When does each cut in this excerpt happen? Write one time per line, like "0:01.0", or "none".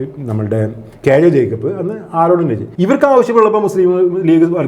0:02.6